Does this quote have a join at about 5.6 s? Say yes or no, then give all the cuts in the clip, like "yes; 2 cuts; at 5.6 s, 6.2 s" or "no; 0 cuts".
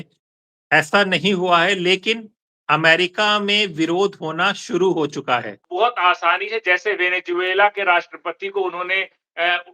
yes; 1 cut; at 5.6 s